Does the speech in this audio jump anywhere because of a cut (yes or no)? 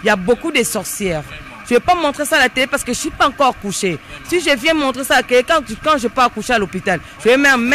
no